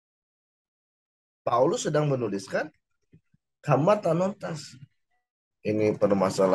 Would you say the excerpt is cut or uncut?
cut